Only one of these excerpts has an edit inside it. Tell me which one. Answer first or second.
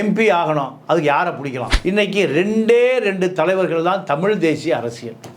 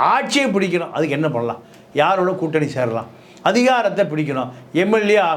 first